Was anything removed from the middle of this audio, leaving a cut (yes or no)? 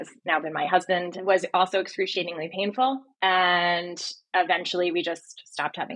yes